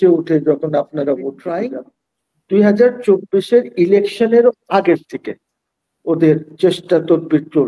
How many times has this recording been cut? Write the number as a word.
one